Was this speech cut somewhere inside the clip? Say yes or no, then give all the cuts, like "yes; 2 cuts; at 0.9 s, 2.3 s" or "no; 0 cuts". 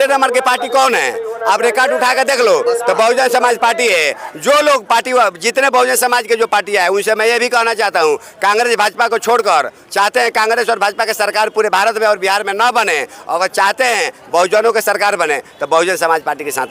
no; 0 cuts